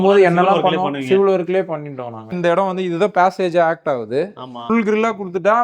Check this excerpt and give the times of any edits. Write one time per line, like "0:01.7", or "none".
0:02.3
0:04.6